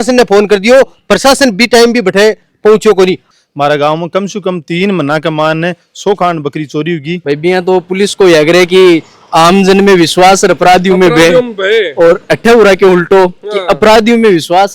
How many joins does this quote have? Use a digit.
2